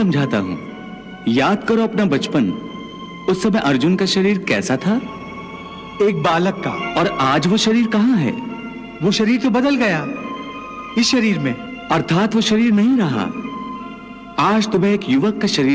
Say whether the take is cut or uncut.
cut